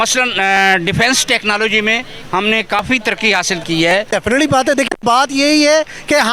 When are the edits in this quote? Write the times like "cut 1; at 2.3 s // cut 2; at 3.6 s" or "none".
cut 1; at 4.1 s